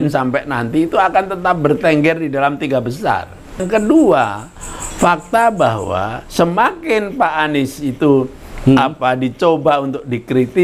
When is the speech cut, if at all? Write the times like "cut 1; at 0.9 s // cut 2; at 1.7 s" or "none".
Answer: cut 1; at 3.6 s